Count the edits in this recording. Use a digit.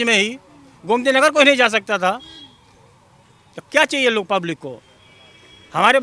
0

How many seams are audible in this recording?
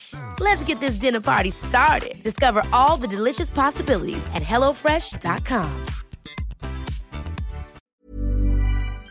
1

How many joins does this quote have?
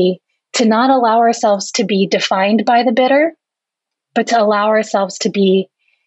0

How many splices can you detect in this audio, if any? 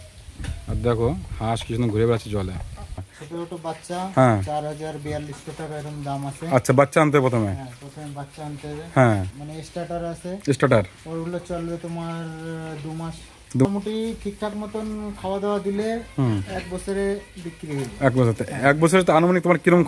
3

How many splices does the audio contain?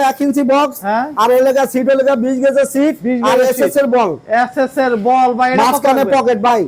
0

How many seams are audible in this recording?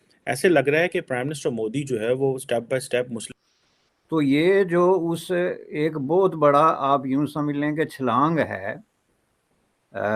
1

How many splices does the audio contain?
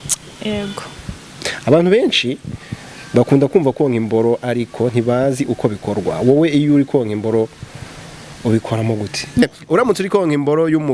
1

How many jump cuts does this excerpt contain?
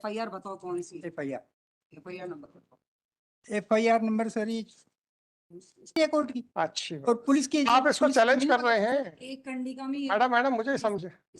1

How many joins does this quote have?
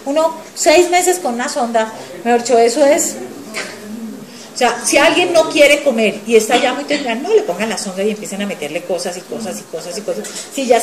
1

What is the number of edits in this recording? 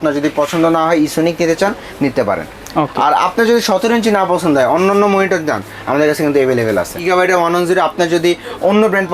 1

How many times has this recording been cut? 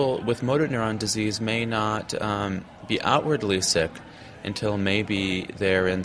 0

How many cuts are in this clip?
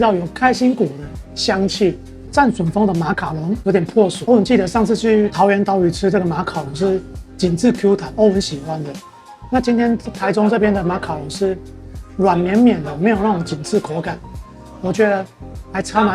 2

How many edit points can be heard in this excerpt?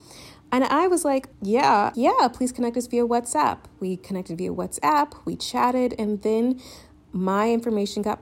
0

